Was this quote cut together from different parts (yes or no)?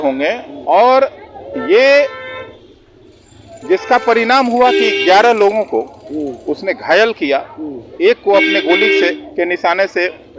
no